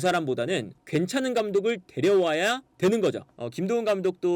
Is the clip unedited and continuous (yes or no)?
no